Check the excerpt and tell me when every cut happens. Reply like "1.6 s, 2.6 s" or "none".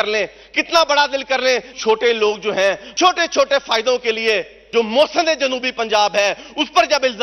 1.7 s, 2.9 s, 4.6 s